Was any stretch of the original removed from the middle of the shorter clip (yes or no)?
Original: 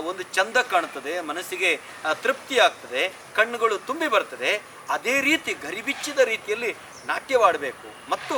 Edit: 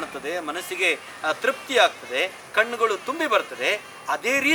no